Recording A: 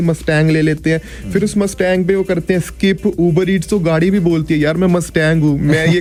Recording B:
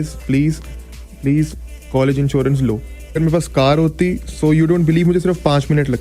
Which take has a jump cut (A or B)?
B